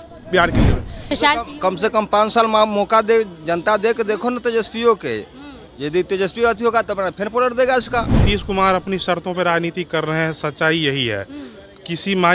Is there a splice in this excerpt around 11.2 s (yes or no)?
no